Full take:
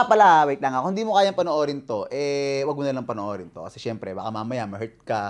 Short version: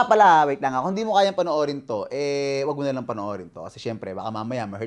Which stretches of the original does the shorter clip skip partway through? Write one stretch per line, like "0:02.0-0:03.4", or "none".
none